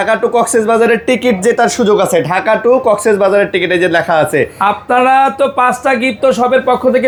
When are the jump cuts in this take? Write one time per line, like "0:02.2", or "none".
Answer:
none